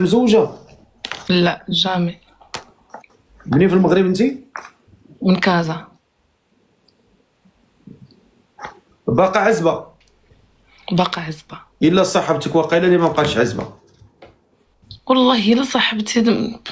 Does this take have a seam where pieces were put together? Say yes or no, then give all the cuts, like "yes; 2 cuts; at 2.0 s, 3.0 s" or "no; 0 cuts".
yes; 1 cut; at 11.8 s